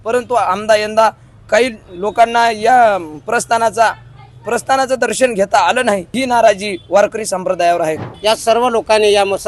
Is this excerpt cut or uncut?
cut